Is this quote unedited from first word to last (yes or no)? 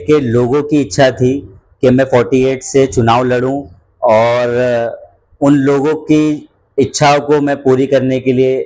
yes